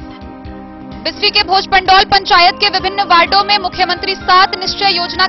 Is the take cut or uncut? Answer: cut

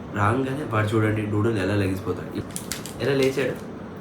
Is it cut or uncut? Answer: cut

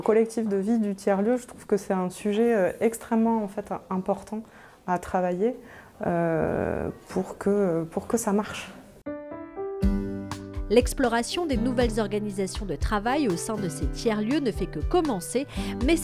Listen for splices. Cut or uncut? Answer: uncut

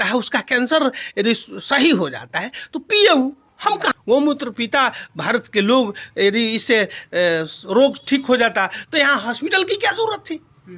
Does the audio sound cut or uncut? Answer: cut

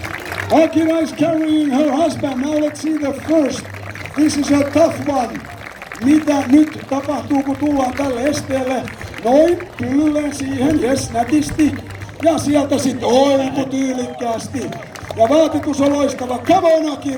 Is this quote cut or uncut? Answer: uncut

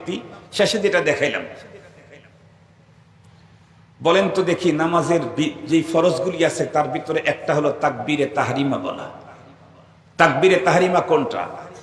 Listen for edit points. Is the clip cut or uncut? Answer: uncut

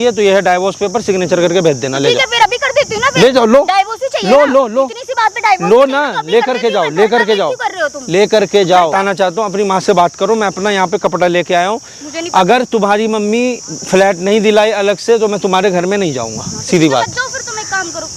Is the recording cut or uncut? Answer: cut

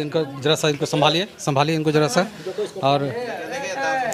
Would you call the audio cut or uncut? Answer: uncut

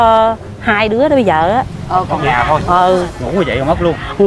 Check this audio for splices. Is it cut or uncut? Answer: cut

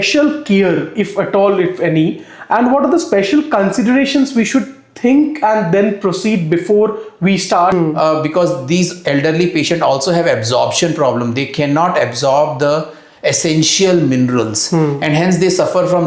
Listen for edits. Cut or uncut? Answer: cut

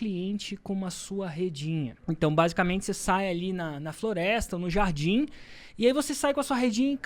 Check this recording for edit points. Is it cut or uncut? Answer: cut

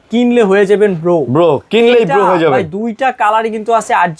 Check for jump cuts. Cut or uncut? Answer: uncut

